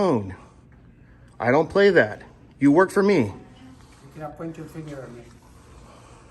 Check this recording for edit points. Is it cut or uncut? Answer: cut